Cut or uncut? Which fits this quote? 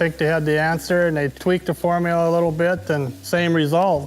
cut